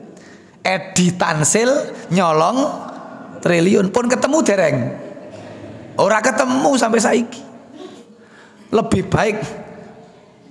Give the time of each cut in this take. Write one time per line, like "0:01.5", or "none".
0:08.0